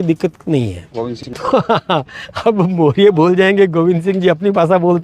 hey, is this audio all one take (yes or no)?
no